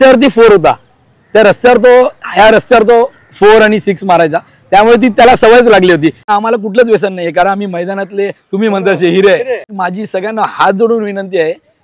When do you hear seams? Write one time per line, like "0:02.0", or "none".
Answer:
0:06.2
0:09.7